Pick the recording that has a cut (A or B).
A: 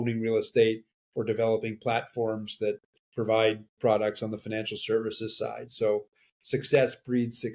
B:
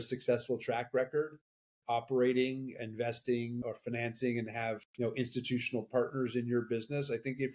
B